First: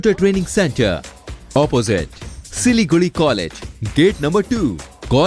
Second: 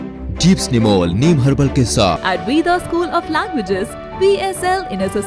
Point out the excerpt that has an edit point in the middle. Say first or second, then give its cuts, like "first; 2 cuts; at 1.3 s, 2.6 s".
second; 1 cut; at 2.2 s